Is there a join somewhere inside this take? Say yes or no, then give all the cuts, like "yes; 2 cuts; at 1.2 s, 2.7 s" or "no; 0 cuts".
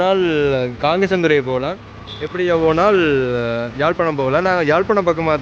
no; 0 cuts